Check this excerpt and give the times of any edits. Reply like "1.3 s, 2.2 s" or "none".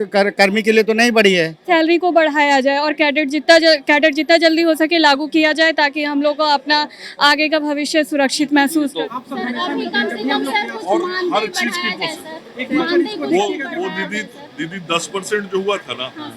1.6 s, 9.0 s